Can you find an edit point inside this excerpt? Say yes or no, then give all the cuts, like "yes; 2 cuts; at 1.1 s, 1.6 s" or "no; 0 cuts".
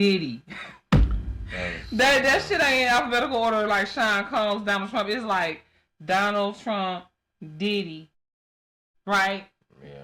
no; 0 cuts